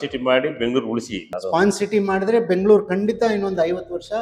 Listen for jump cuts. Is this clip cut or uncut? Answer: cut